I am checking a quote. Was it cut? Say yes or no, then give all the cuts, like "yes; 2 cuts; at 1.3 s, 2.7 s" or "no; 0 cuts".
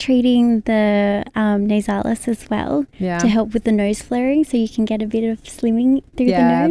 no; 0 cuts